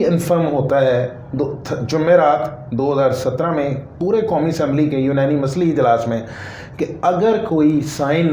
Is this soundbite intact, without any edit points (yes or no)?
yes